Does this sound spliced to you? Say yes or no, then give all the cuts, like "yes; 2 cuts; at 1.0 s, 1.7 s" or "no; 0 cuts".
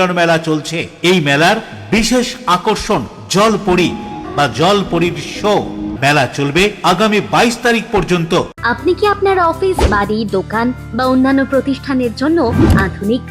yes; 3 cuts; at 4.2 s, 5.9 s, 8.5 s